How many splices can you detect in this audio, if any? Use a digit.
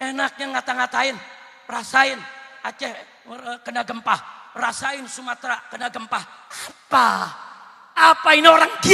0